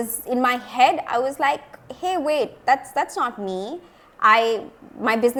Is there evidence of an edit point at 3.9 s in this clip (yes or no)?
no